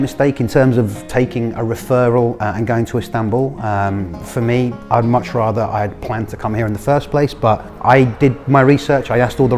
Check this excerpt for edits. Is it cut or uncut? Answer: uncut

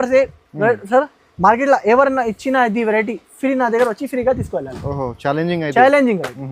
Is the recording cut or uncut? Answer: uncut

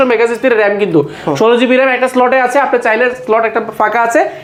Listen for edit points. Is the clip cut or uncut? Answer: uncut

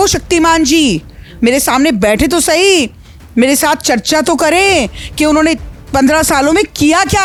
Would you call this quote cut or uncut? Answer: uncut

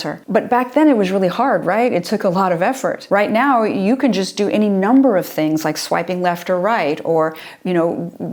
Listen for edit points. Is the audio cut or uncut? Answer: uncut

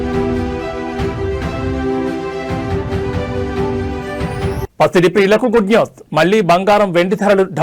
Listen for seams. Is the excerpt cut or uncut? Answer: uncut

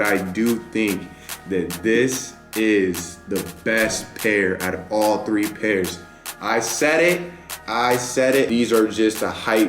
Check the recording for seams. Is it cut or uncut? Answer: cut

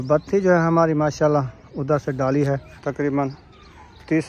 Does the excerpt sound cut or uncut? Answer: cut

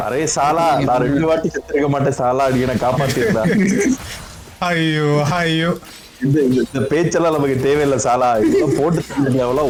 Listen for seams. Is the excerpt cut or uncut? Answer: uncut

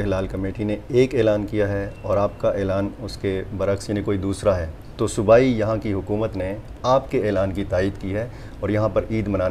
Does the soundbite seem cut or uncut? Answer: uncut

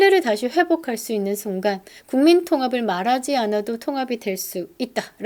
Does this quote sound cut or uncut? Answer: uncut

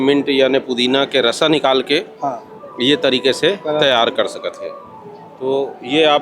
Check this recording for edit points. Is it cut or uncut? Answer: uncut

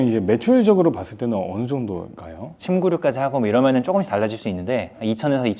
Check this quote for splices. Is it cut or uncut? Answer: uncut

